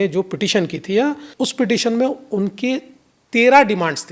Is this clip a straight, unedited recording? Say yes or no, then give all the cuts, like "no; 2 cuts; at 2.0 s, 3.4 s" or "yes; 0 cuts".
no; 1 cut; at 1.2 s